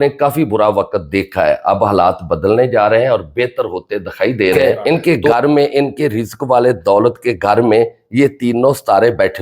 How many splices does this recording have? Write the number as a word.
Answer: one